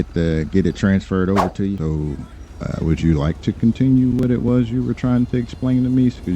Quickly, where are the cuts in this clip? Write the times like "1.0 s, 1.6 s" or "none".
1.8 s

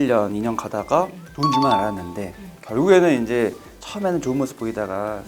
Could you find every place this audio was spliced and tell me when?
1.2 s

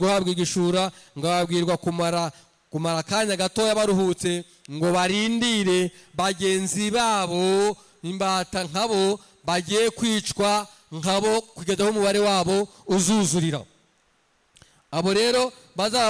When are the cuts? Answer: none

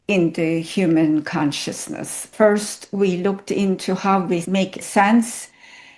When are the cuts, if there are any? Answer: 2.3 s, 4.4 s

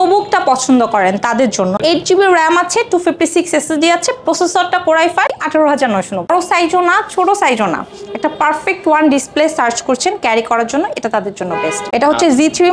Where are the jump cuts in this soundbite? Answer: 1.8 s, 5.4 s, 6.3 s, 11.9 s

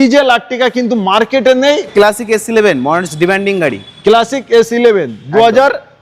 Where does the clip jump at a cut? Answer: 1.9 s

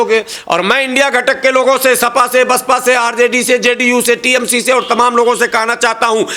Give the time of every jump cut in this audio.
none

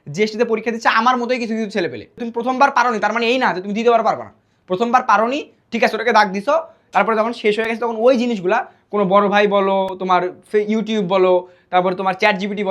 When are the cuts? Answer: 2.2 s

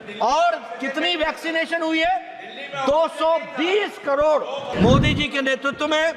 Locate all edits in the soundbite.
4.7 s

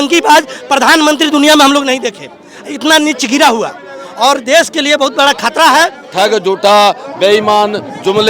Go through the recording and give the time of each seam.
6.0 s

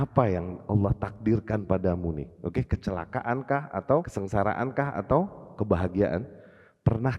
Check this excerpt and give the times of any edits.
4.2 s

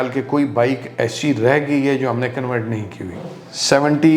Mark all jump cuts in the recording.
3.3 s

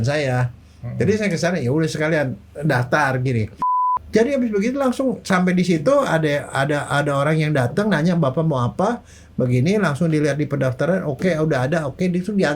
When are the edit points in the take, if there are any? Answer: 3.9 s

